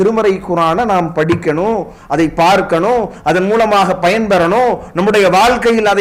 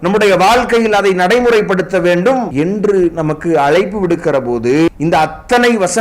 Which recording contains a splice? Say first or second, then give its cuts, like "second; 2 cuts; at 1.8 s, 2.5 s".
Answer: second; 2 cuts; at 2.5 s, 4.9 s